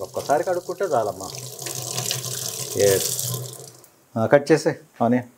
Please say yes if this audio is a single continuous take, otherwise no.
yes